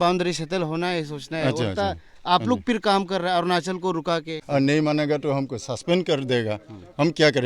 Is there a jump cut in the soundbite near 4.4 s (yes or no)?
yes